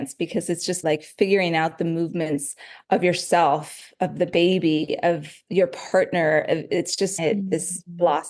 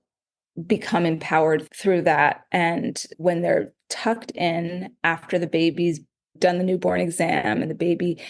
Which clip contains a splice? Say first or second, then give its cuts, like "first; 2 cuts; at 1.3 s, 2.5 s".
second; 1 cut; at 3.0 s